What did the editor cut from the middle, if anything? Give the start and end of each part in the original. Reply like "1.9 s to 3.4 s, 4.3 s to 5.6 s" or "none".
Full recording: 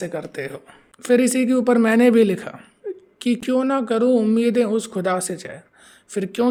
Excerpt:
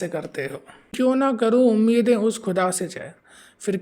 0.9 s to 3.4 s